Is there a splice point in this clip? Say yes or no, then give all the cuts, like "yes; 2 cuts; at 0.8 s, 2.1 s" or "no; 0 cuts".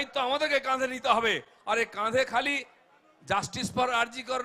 no; 0 cuts